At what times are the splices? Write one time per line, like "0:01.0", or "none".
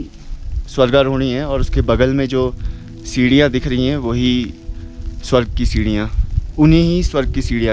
none